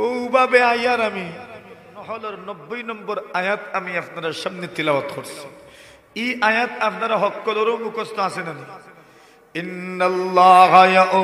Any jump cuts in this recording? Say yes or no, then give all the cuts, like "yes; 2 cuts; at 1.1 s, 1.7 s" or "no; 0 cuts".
yes; 1 cut; at 1.9 s